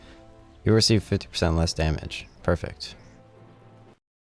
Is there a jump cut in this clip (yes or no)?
no